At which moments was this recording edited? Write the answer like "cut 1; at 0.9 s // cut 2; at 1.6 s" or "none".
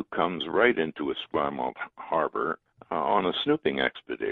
cut 1; at 2.6 s